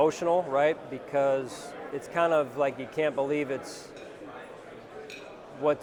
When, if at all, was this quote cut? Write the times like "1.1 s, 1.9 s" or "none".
none